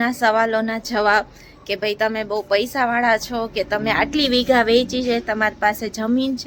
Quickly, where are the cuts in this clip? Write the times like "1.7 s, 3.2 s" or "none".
none